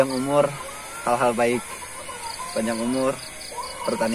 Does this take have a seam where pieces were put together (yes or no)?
no